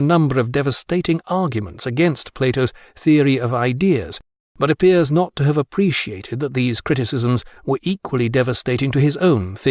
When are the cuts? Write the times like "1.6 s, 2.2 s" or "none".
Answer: none